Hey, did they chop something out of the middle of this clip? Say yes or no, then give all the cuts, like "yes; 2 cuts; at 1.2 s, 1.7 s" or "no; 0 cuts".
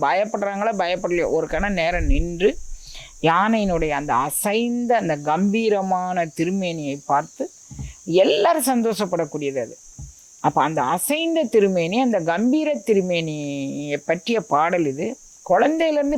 no; 0 cuts